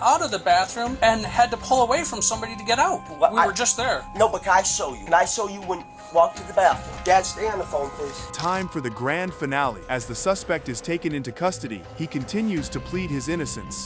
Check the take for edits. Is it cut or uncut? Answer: uncut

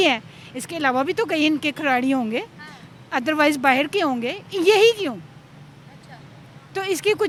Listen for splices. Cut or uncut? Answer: uncut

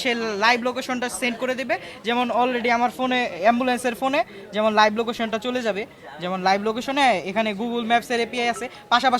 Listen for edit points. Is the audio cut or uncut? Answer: uncut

